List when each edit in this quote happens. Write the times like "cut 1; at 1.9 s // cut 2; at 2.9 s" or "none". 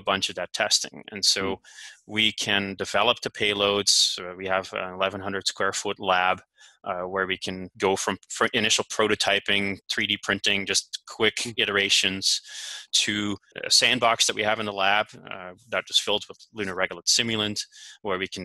cut 1; at 7.7 s // cut 2; at 13.5 s